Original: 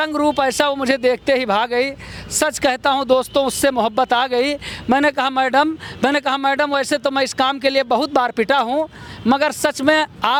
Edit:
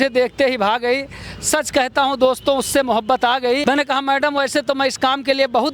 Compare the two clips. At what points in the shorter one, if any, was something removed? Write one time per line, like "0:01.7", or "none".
0:03.6